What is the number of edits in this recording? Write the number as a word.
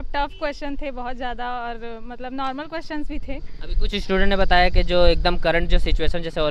zero